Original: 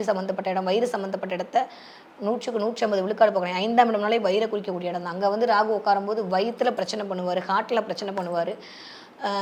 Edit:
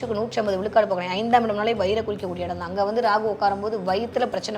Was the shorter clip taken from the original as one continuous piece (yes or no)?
yes